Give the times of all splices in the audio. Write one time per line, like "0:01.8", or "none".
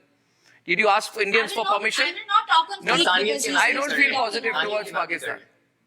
0:02.8